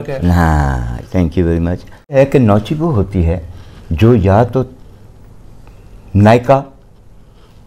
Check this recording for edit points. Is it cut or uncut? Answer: cut